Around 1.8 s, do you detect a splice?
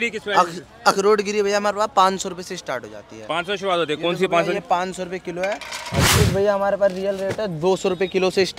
no; 1 cut; at 6.0 s

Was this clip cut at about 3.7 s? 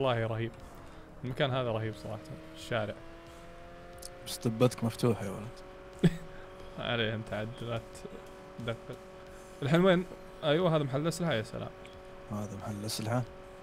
no; 0 cuts

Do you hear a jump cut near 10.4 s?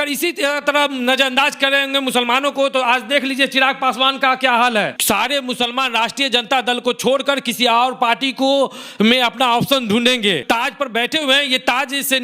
yes; 2 cuts; at 5.0 s, 10.4 s

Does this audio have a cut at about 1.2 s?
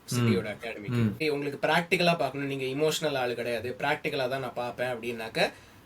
yes; 1 cut; at 1.2 s

